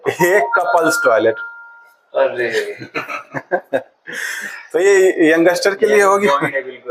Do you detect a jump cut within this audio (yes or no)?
no